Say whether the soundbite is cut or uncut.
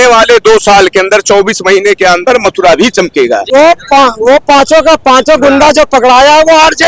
cut